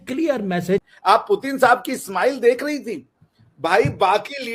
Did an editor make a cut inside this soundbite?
yes; 1 cut; at 0.9 s

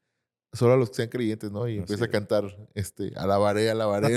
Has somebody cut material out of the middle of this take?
no; 0 cuts

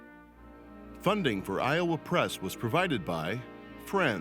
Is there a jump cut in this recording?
yes; 1 cut; at 1.0 s

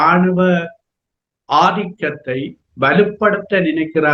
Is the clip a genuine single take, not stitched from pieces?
yes; 0 cuts

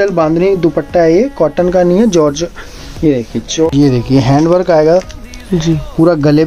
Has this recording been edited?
yes; 1 cut; at 3.7 s

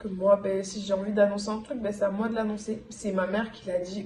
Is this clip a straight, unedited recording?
yes; 0 cuts

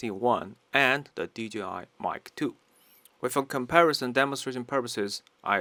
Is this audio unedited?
yes; 0 cuts

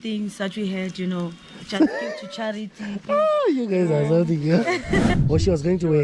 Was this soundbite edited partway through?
yes; 1 cut; at 5.1 s

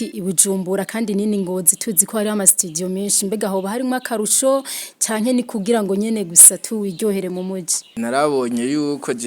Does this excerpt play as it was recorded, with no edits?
no; 1 cut; at 7.9 s

